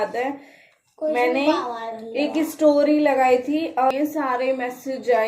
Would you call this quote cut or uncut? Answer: cut